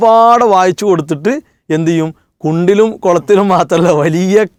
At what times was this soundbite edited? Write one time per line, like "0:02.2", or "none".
none